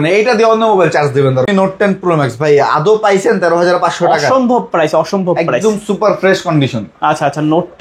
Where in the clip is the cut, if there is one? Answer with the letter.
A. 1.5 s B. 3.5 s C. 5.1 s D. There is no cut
A